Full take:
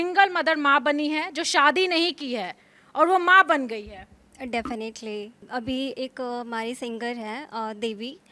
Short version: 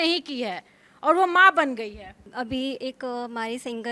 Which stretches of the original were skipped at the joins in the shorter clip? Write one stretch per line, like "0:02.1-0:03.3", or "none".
0:04.1-0:05.4